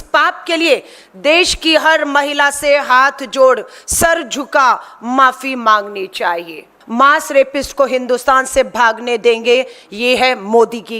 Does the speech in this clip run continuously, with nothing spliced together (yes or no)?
no